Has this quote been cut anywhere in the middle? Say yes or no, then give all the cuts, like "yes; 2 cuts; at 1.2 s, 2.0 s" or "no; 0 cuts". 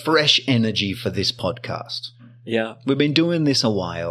no; 0 cuts